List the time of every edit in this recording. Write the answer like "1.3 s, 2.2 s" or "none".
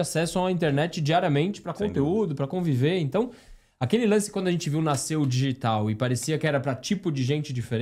none